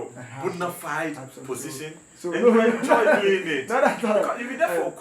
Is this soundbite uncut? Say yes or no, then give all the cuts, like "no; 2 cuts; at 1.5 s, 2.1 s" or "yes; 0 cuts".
yes; 0 cuts